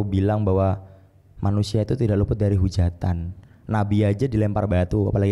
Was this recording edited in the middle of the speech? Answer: no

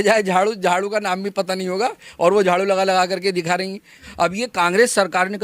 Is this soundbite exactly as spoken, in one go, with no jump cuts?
no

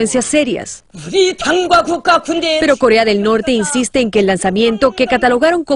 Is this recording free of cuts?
yes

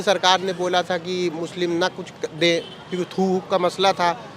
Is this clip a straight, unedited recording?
yes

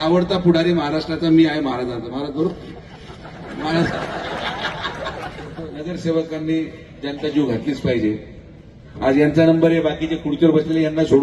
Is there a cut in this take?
yes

